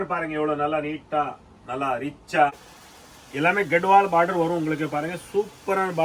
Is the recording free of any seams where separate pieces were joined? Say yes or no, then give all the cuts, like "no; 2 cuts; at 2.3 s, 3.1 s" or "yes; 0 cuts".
no; 1 cut; at 2.7 s